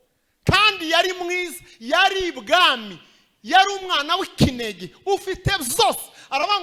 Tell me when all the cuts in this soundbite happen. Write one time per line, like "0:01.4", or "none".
none